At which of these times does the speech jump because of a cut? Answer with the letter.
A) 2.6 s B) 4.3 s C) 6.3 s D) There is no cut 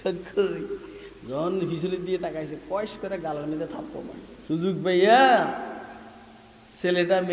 B